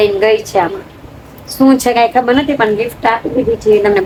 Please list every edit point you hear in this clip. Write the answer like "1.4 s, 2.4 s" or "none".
none